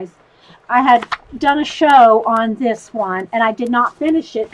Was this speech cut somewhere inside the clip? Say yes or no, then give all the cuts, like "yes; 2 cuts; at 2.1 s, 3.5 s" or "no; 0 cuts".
no; 0 cuts